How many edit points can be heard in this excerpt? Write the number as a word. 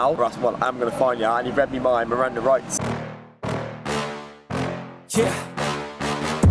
one